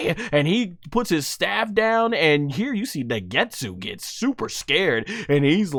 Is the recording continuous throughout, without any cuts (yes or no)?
yes